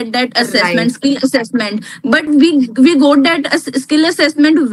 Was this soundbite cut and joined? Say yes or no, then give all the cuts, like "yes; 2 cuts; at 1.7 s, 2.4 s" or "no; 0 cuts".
no; 0 cuts